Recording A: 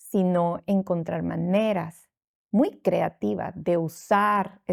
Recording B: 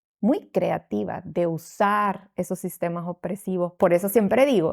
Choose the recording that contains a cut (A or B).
B